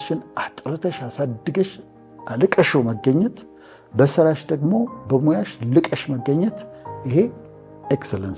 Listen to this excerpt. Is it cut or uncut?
uncut